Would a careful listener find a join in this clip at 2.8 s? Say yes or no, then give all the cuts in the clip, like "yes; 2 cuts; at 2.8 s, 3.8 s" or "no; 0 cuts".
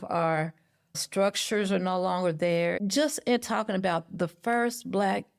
yes; 1 cut; at 2.8 s